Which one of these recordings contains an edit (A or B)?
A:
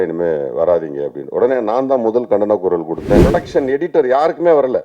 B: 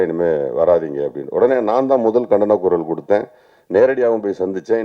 A